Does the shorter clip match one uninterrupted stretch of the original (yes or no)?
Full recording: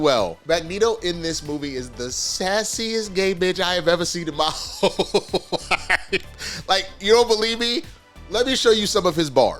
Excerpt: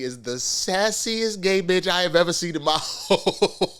yes